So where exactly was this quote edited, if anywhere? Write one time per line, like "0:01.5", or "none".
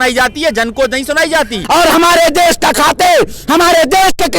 0:01.6